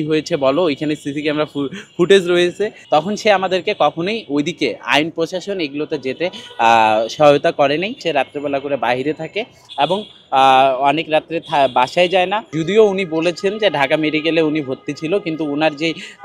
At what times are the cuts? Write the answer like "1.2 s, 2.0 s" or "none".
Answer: 2.7 s, 8.0 s, 12.5 s